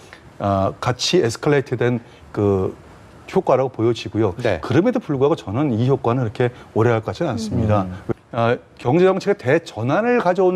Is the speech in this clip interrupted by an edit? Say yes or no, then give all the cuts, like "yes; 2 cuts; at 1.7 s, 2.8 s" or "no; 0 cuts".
yes; 1 cut; at 8.0 s